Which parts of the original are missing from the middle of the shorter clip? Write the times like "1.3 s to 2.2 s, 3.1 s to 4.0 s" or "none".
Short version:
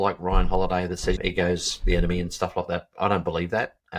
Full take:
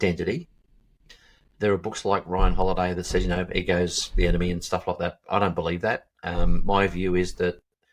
3.2 s to 3.5 s